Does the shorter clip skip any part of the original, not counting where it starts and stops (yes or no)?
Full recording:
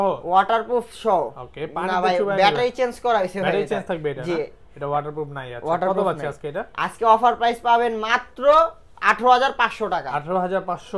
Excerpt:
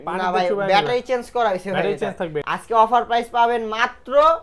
yes